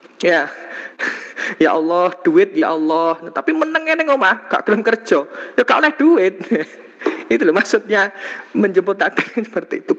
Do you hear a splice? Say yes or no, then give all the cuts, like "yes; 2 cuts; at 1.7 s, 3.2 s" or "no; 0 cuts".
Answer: no; 0 cuts